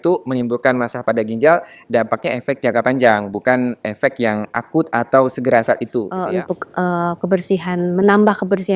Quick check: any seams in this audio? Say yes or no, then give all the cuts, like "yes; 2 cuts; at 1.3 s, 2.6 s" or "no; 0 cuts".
yes; 1 cut; at 6.2 s